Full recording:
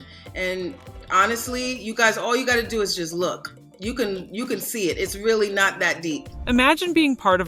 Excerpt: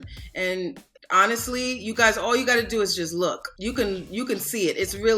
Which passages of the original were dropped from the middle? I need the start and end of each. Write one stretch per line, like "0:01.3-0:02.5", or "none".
0:03.5-0:03.7